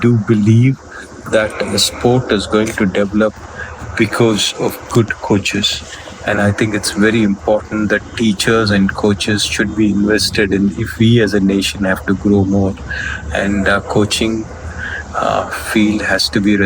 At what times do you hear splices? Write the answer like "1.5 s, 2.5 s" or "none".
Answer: none

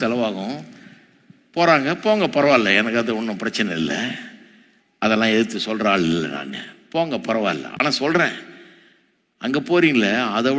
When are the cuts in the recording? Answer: none

